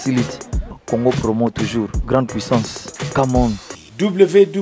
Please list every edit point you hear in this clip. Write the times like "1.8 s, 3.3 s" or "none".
3.6 s